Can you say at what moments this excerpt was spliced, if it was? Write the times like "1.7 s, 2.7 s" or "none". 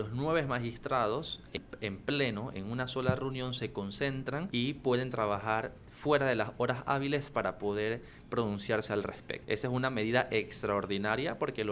1.6 s, 4.5 s, 9.3 s